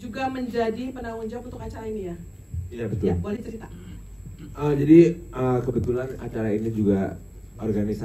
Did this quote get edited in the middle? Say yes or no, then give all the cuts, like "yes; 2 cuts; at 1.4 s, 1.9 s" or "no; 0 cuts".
no; 0 cuts